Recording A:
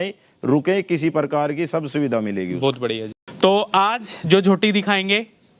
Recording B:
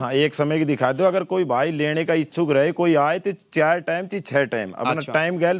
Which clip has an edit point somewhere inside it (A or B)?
A